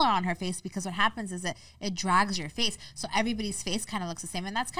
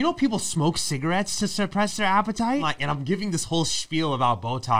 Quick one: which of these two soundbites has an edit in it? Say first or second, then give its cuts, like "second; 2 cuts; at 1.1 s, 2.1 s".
second; 1 cut; at 2.7 s